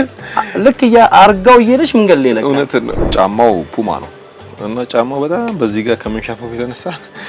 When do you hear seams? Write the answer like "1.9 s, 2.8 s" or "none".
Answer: 3.0 s, 4.5 s